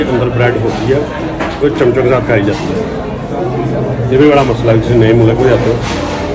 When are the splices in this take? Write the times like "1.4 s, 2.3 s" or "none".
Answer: none